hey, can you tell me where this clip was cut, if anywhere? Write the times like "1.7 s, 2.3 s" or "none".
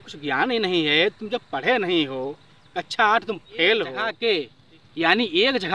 4.1 s